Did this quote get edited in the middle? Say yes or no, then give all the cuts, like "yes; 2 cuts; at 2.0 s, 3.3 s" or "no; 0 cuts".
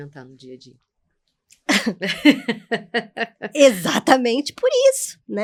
no; 0 cuts